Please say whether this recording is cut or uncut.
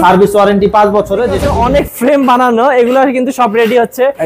cut